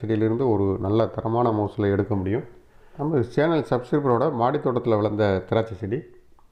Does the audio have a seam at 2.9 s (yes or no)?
yes